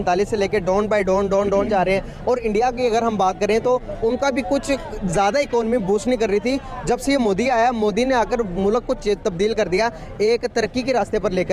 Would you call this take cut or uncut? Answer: uncut